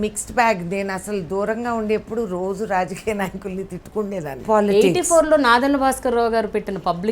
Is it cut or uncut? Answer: cut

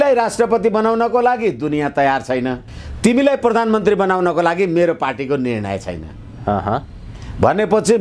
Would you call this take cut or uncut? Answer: cut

